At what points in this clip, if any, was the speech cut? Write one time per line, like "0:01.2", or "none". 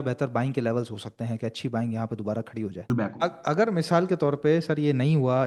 0:02.9